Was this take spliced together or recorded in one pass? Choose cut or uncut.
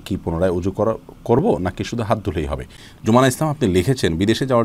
cut